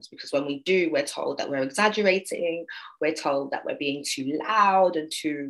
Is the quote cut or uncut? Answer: uncut